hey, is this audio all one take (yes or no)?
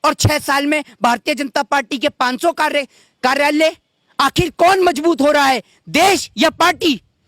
yes